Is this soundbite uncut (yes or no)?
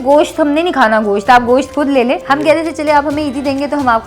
no